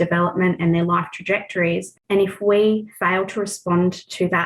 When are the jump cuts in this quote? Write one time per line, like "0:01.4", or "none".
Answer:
0:01.9
0:02.9